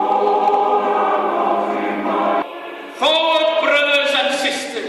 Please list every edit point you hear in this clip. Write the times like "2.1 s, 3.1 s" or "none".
2.3 s

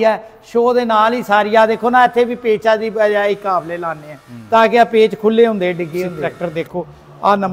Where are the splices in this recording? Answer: 6.2 s

